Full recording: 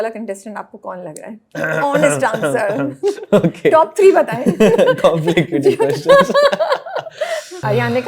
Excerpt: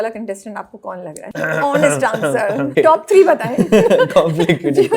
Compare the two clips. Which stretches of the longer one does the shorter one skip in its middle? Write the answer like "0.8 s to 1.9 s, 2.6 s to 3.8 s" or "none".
1.2 s to 1.4 s, 2.9 s to 3.6 s